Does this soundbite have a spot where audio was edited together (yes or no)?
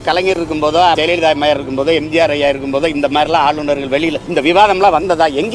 yes